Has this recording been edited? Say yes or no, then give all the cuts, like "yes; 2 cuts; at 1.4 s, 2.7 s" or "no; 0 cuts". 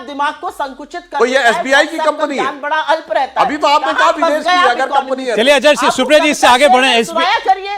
no; 0 cuts